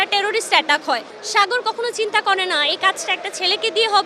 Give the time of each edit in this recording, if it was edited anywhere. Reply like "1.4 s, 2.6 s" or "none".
1.1 s